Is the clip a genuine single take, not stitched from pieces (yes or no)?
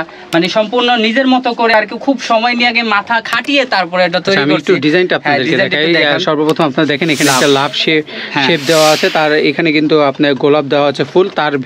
yes